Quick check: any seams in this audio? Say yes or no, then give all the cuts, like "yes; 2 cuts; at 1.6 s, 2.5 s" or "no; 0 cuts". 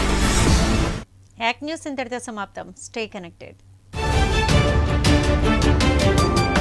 no; 0 cuts